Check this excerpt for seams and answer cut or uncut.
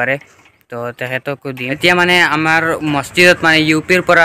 cut